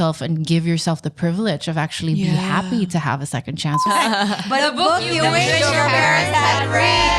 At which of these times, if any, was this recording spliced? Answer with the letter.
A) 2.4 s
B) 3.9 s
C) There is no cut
B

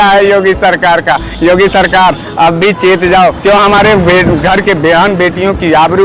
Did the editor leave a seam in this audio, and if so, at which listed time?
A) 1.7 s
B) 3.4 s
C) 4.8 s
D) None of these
B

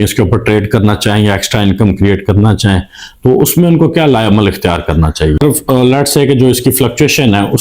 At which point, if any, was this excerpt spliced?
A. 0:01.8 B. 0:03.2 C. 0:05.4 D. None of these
C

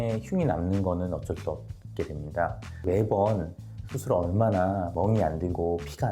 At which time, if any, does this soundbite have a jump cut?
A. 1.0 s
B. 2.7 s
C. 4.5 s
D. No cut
B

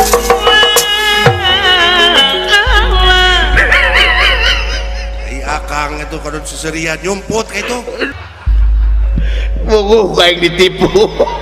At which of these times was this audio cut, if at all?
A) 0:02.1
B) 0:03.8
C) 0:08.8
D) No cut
A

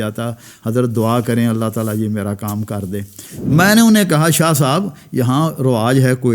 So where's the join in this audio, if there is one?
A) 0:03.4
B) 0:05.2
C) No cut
A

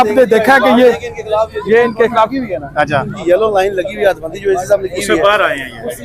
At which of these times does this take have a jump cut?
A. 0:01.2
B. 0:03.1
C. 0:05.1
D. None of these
B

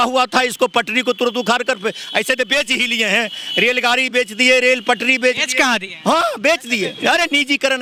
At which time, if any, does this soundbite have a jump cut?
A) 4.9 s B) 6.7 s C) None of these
C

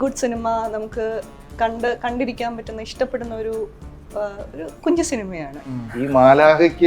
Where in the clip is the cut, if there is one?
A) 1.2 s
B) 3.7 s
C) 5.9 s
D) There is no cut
C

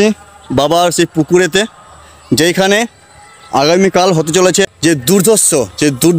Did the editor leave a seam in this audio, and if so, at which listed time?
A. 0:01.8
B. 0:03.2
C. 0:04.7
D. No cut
C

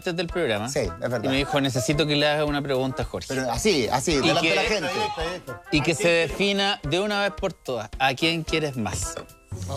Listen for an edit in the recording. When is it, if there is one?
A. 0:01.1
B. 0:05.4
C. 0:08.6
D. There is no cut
D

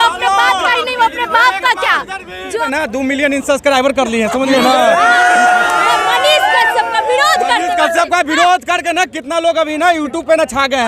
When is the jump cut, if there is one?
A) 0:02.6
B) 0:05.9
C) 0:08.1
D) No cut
A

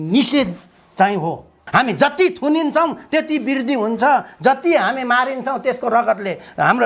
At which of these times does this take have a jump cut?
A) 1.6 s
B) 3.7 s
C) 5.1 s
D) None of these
A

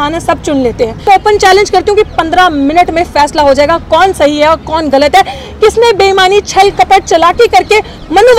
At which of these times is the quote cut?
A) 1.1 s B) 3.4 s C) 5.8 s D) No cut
A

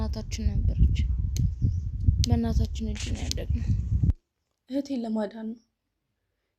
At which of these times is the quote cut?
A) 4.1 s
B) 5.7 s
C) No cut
A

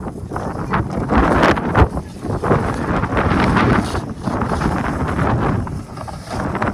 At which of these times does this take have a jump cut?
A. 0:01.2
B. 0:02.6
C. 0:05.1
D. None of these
D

